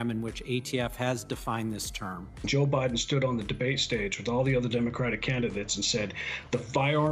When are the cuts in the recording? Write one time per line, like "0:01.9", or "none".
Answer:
0:02.3